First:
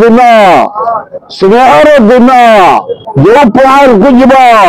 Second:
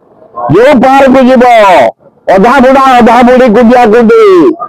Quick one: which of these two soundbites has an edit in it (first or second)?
first